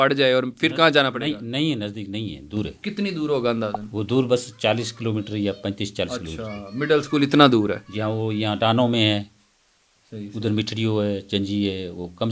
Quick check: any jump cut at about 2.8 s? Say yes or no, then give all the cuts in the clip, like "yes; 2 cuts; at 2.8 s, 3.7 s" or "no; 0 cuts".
no; 0 cuts